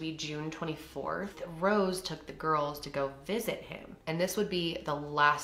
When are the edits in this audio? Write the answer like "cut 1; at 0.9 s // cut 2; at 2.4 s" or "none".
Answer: cut 1; at 1.4 s